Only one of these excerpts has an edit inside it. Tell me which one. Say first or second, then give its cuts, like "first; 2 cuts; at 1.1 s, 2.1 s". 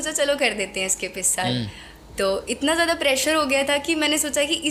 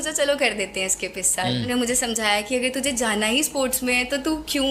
second; 1 cut; at 1.7 s